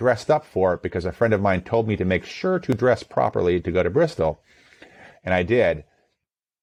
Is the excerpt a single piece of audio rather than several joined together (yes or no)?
yes